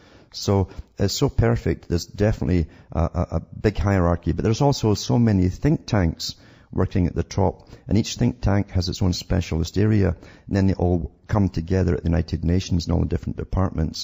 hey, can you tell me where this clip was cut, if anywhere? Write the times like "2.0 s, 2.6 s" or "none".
12.3 s